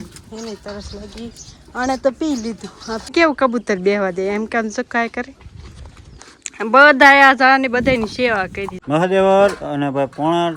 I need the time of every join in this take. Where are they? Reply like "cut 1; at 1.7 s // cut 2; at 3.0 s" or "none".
cut 1; at 3.0 s // cut 2; at 8.7 s